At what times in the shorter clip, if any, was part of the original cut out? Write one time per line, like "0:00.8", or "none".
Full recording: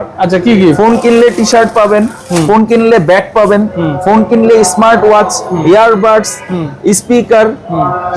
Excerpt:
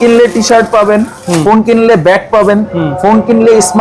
none